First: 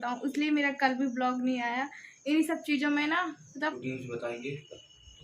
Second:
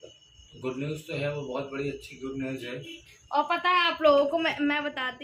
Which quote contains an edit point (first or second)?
first